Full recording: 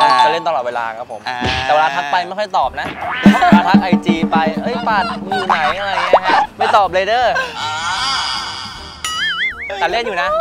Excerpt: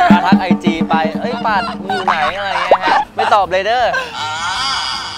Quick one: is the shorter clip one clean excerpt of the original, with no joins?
yes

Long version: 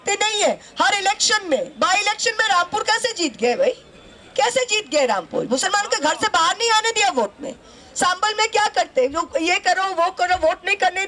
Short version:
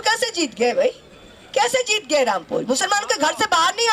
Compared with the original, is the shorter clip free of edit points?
yes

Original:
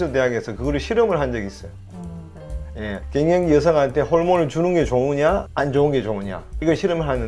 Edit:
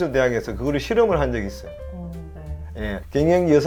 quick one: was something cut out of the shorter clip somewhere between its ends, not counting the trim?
no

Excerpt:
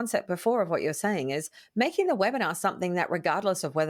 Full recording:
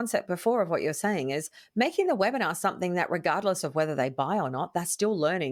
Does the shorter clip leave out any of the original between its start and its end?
no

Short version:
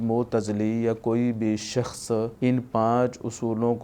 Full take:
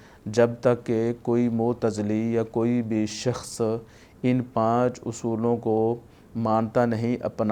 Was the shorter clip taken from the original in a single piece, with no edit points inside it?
no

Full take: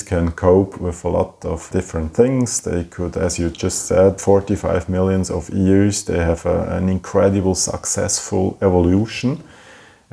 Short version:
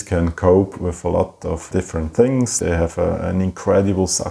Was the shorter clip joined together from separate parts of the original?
yes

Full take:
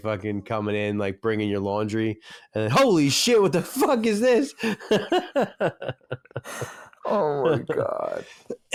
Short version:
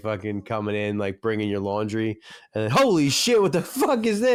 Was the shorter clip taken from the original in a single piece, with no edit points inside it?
yes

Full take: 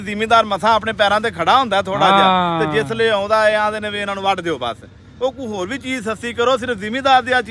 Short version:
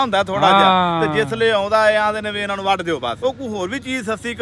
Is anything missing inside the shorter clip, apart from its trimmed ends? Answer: yes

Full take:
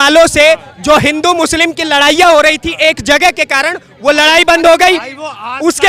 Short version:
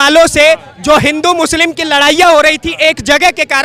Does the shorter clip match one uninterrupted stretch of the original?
yes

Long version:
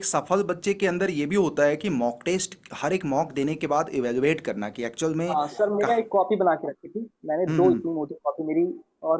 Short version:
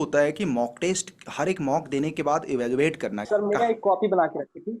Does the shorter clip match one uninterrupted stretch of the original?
no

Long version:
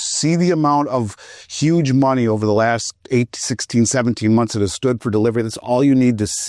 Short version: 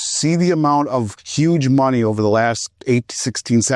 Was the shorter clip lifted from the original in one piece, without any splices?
no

